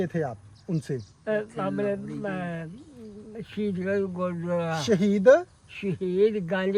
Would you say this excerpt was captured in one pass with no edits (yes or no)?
yes